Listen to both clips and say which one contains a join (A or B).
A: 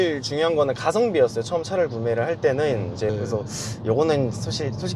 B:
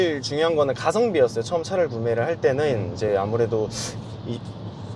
A